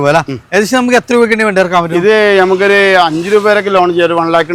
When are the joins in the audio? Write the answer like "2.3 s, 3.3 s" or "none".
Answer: none